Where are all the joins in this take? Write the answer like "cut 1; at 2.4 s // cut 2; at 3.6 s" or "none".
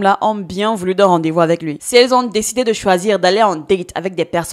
cut 1; at 1.8 s